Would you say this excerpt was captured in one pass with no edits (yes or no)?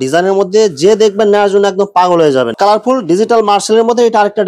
no